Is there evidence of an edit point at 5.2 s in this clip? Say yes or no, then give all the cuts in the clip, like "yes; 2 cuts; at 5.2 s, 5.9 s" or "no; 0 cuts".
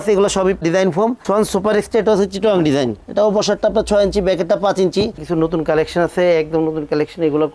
yes; 2 cuts; at 1.2 s, 5.2 s